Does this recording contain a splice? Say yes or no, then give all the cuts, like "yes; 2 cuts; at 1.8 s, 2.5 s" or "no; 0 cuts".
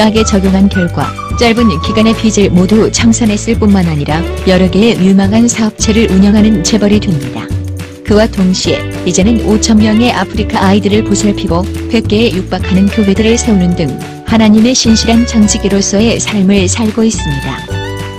yes; 1 cut; at 11.4 s